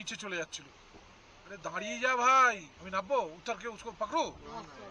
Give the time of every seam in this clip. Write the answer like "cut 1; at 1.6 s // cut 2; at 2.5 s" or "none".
cut 1; at 2.7 s